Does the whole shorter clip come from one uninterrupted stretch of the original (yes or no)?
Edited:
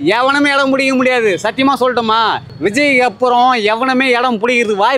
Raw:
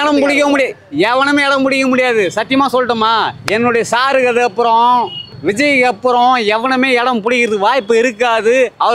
no